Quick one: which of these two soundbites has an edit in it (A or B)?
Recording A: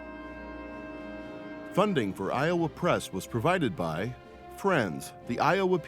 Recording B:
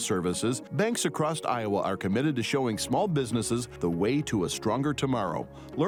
A